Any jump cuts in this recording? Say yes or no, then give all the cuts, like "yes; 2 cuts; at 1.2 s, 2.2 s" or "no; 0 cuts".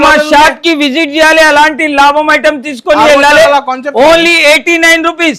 no; 0 cuts